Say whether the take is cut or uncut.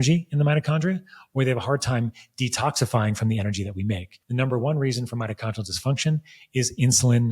cut